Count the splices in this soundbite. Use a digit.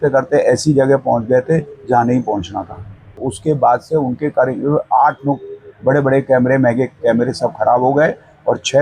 1